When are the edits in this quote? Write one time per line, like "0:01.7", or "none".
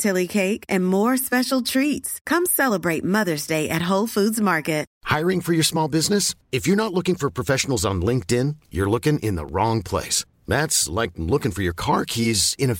0:04.9